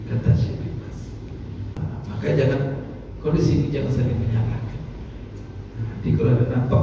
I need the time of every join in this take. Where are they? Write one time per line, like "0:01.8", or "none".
0:01.8